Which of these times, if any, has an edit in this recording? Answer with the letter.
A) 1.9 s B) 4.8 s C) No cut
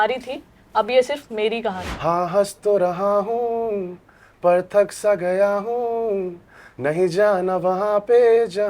A